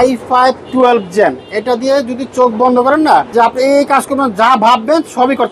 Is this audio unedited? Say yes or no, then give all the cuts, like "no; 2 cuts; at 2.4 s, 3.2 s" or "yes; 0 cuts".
no; 1 cut; at 3.3 s